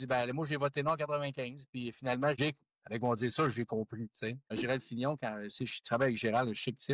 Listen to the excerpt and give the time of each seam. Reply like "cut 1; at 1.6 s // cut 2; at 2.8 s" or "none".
cut 1; at 2.4 s // cut 2; at 4.4 s

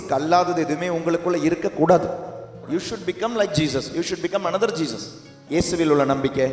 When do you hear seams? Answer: cut 1; at 2.6 s // cut 2; at 5.4 s

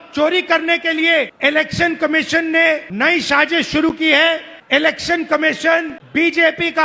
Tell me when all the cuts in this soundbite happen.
cut 1; at 1.3 s // cut 2; at 2.9 s // cut 3; at 4.5 s // cut 4; at 6.0 s

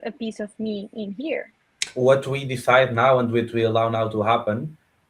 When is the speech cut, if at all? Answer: cut 1; at 1.8 s

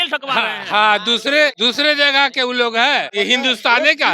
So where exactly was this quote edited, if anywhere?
cut 1; at 1.6 s // cut 2; at 3.1 s

